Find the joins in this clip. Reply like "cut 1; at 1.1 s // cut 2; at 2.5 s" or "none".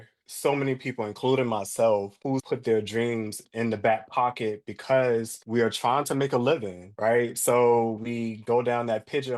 cut 1; at 2.3 s // cut 2; at 3.4 s // cut 3; at 5.4 s